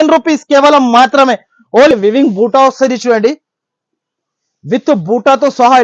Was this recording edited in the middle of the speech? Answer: yes; 1 cut; at 1.9 s

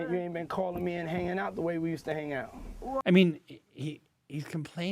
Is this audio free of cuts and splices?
no; 1 cut; at 3.0 s

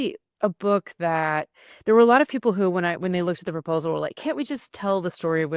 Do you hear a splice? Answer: no; 0 cuts

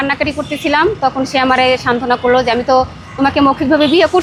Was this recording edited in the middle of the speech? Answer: no; 0 cuts

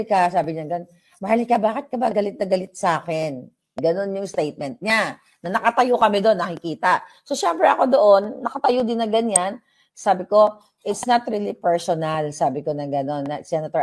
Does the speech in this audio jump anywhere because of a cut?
no; 0 cuts

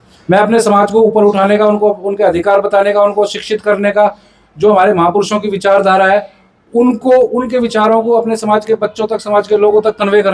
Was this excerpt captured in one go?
yes; 0 cuts

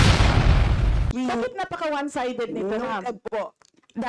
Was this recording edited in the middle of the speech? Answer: yes; 1 cut; at 1.0 s

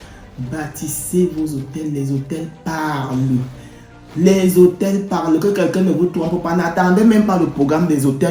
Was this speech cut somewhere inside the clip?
no; 0 cuts

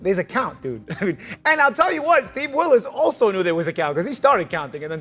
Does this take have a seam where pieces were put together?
no; 0 cuts

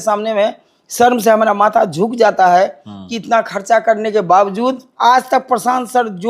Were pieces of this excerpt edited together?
yes; 1 cut; at 4.9 s

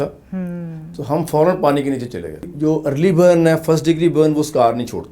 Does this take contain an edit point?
yes; 1 cut; at 2.5 s

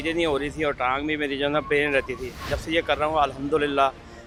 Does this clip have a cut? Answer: no; 0 cuts

